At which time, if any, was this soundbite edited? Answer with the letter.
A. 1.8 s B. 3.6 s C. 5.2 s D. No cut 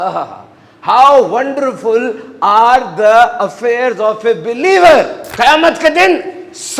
C